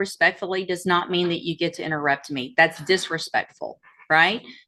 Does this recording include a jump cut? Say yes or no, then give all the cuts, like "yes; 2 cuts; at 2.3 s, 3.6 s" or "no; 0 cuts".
no; 0 cuts